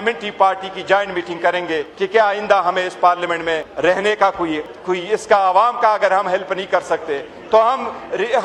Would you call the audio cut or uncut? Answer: cut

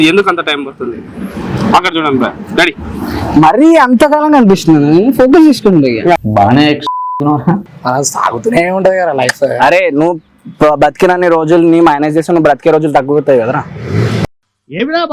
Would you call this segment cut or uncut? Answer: cut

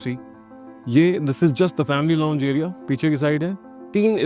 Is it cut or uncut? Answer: uncut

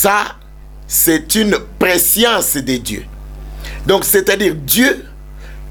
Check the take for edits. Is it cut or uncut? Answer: uncut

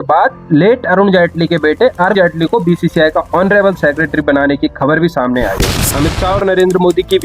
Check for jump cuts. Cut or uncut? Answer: cut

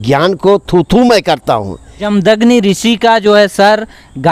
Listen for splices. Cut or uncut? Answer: cut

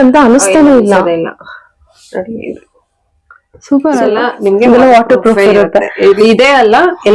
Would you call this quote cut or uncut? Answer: cut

